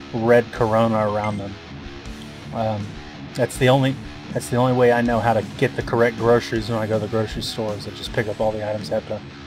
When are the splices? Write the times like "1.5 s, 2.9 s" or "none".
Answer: none